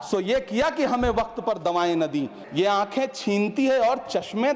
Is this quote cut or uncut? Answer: cut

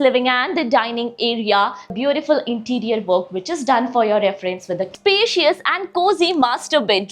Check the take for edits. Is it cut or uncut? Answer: cut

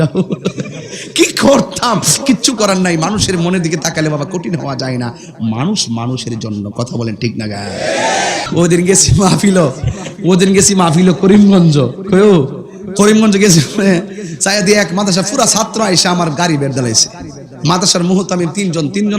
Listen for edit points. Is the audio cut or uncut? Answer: cut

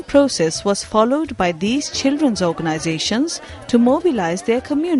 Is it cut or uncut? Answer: cut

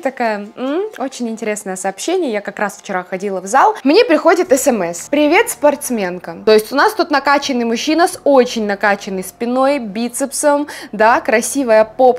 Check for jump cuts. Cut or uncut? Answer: cut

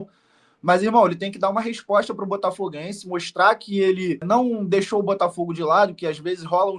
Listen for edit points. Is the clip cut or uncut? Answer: cut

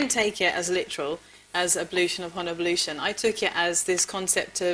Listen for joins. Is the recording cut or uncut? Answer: cut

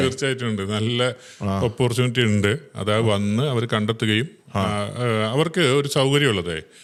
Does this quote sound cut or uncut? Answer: uncut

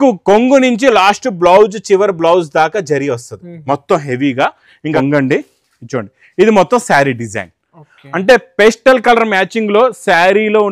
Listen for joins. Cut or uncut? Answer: cut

